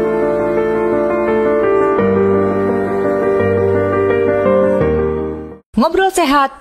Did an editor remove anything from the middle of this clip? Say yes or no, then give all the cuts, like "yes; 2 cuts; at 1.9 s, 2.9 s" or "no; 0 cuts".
no; 0 cuts